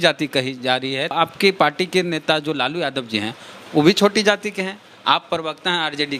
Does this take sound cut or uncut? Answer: cut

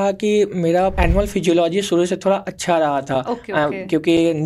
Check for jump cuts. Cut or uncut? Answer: cut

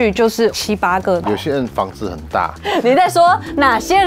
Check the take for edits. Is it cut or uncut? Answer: cut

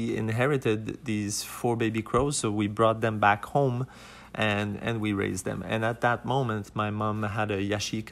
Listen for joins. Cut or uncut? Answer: uncut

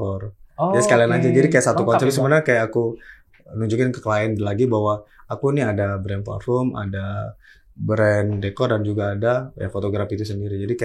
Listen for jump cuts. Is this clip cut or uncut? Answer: uncut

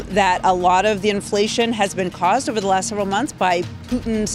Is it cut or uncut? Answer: uncut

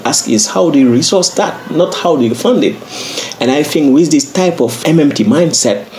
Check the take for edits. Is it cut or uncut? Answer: cut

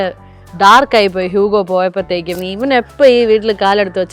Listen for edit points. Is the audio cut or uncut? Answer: cut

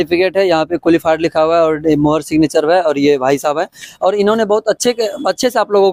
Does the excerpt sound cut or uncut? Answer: uncut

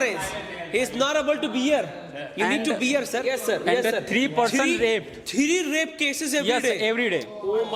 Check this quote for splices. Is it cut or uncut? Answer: cut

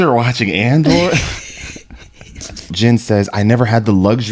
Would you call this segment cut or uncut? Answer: cut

